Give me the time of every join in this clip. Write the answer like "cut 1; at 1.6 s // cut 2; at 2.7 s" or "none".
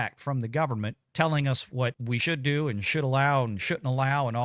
cut 1; at 1.0 s // cut 2; at 2.1 s